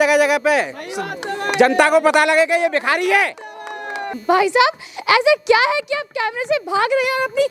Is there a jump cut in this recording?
yes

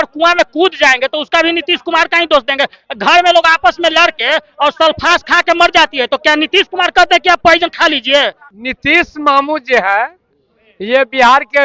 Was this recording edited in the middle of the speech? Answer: yes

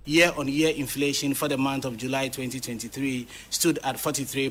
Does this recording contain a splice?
no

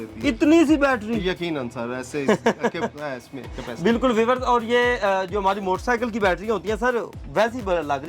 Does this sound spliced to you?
no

